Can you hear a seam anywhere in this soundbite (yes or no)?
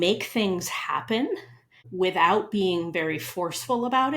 yes